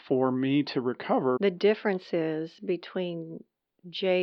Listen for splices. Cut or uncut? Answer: cut